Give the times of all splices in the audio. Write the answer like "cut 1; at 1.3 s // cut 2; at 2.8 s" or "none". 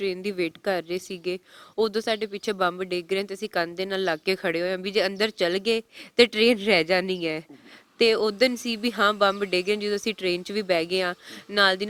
none